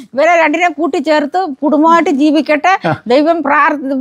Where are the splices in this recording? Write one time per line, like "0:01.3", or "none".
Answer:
none